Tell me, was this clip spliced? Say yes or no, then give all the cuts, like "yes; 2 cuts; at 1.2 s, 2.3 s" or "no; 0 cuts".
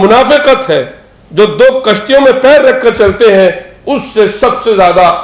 no; 0 cuts